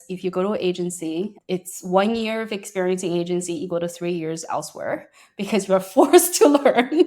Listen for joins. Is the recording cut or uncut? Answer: cut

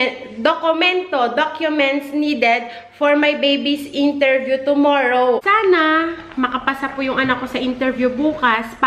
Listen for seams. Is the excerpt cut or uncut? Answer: cut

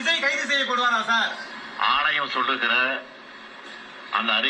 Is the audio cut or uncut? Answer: uncut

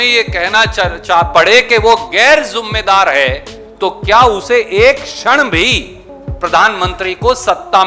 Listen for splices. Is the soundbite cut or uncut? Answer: uncut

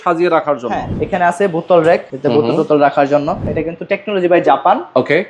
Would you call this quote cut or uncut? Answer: cut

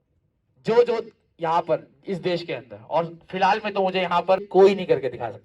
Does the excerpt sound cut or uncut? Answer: cut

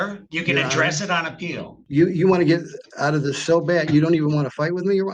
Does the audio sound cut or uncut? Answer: cut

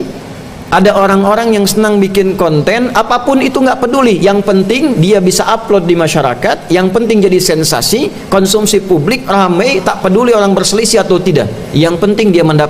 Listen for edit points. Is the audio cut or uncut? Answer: uncut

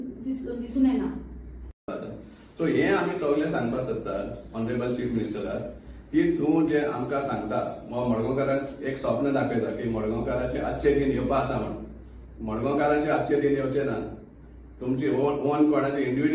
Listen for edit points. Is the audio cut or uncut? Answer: uncut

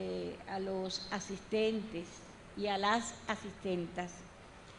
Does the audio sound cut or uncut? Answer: cut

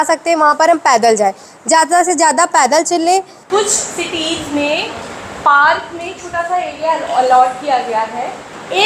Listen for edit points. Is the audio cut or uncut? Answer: uncut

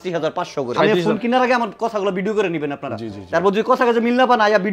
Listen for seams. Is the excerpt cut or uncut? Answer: cut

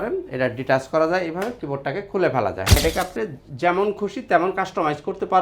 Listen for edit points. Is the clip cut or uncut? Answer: cut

